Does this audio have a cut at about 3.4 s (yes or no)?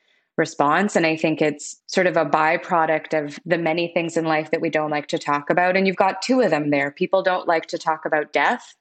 yes